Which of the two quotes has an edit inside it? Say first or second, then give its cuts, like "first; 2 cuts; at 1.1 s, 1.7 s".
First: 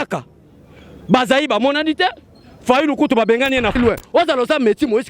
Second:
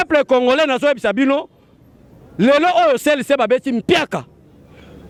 first; 1 cut; at 3.8 s